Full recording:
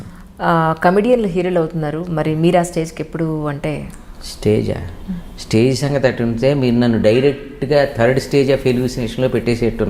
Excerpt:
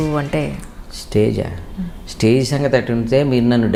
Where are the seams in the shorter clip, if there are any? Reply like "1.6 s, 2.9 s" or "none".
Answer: none